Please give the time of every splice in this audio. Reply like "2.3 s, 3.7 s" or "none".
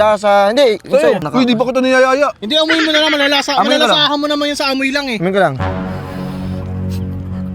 1.2 s